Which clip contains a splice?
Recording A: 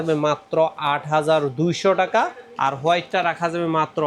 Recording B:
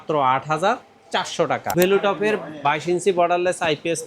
B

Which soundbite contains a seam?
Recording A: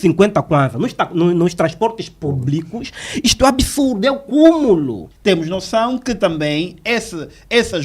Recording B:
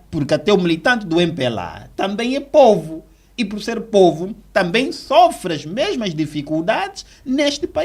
A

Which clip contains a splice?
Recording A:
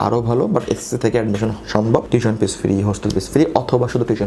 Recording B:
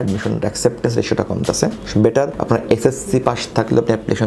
A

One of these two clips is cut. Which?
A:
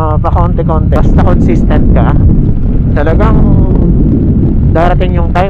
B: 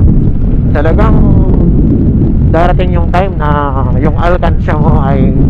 A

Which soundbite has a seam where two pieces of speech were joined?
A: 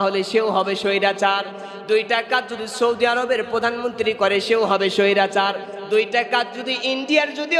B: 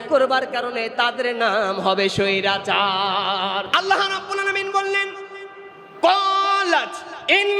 B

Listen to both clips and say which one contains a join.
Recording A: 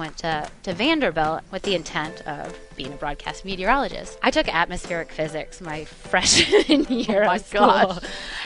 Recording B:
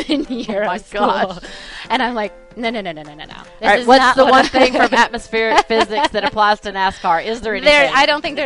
A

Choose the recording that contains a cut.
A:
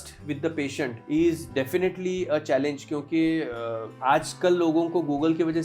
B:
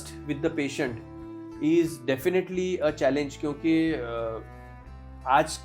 A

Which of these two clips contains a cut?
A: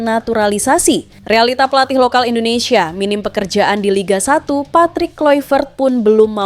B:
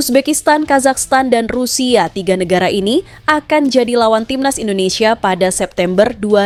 A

